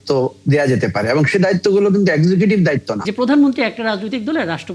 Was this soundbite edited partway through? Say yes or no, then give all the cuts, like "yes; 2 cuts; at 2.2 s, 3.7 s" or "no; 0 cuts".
yes; 1 cut; at 3.0 s